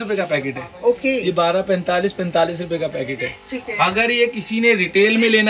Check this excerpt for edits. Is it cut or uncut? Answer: uncut